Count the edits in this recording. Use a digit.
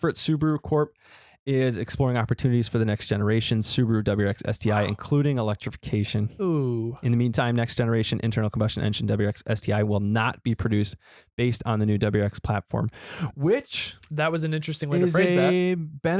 0